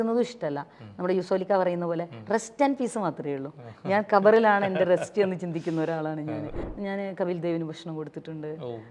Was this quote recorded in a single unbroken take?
no; 1 cut; at 6.6 s

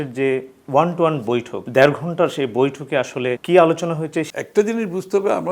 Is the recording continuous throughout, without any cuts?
no; 3 cuts; at 1.6 s, 3.4 s, 4.3 s

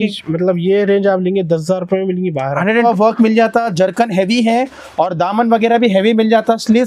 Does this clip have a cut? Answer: yes; 1 cut; at 2.9 s

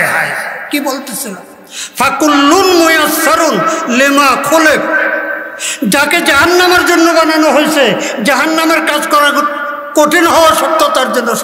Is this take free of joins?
yes; 0 cuts

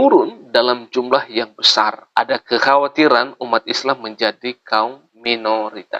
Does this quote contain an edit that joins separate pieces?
yes; 2 cuts; at 2.0 s, 5.1 s

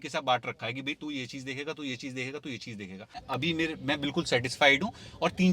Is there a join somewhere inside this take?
yes; 1 cut; at 3.2 s

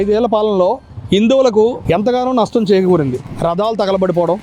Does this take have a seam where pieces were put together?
yes; 1 cut; at 1.8 s

